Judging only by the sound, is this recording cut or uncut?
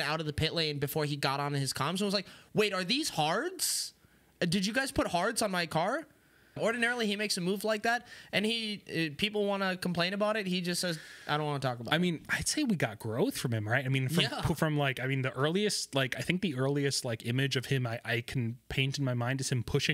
cut